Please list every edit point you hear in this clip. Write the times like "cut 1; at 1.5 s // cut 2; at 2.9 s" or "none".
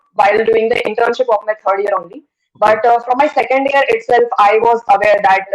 none